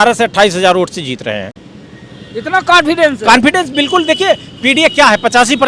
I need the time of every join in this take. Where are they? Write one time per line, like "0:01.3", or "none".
none